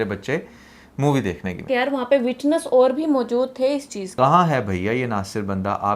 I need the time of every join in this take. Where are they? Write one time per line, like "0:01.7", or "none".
0:01.7
0:04.0